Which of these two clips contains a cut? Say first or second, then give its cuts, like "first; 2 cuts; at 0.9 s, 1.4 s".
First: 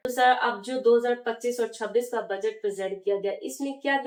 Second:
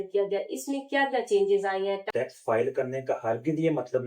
second; 1 cut; at 2.1 s